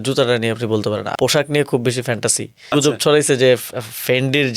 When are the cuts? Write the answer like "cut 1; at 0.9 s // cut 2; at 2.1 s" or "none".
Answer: cut 1; at 1.1 s // cut 2; at 2.7 s